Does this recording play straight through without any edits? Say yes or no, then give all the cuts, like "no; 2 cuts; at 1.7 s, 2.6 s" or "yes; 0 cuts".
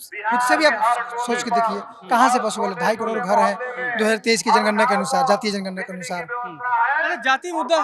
yes; 0 cuts